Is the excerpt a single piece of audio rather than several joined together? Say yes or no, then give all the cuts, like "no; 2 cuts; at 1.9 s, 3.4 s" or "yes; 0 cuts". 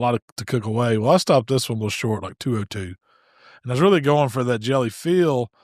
yes; 0 cuts